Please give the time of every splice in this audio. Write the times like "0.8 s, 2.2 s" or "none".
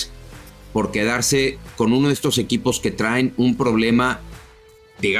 none